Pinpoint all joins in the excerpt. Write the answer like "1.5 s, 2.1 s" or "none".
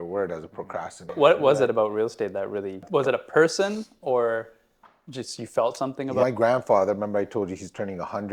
1.2 s, 2.9 s, 6.2 s